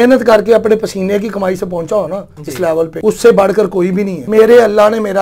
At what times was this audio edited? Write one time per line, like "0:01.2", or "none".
0:02.9
0:04.2